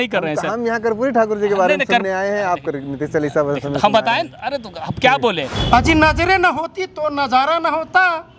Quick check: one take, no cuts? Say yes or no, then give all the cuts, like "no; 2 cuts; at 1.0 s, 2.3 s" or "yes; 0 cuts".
no; 1 cut; at 5.6 s